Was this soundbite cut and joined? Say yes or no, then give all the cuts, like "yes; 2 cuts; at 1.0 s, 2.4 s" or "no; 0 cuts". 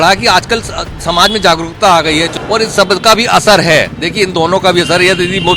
yes; 1 cut; at 2.3 s